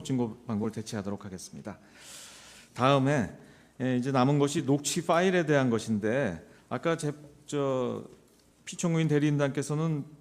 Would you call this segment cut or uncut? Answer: cut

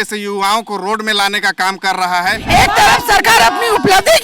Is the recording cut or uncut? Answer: cut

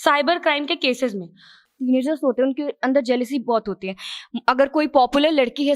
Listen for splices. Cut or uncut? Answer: cut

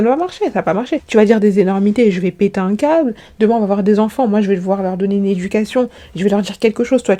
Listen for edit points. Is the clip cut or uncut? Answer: uncut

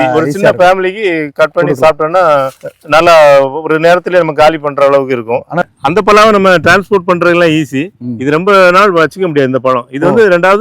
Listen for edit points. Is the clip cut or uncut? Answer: cut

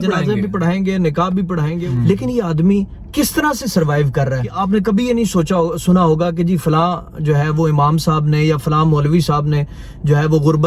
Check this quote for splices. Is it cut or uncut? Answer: cut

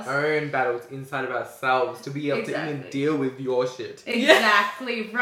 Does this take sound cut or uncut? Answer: uncut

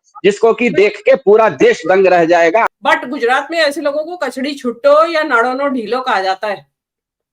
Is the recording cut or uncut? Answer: cut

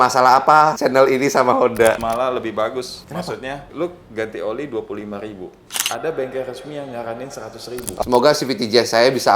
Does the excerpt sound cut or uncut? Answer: cut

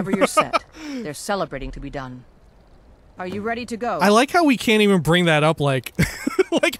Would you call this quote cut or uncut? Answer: cut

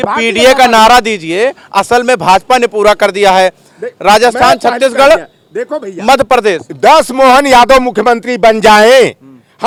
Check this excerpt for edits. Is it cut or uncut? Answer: uncut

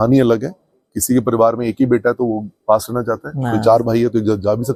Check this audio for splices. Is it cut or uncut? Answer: uncut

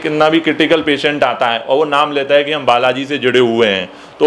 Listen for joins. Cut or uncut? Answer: uncut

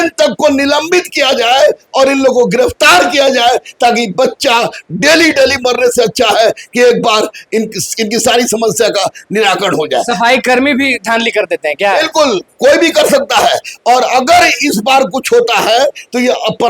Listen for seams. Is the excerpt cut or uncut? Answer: uncut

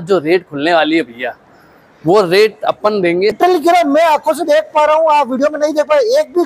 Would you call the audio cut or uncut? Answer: cut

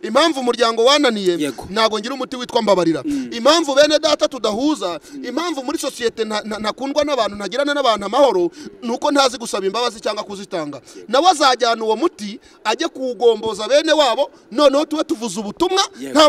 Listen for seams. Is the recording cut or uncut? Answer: uncut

